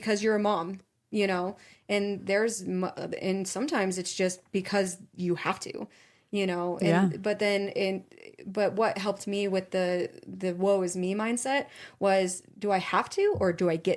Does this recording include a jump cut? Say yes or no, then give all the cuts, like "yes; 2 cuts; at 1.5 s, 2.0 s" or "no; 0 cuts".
no; 0 cuts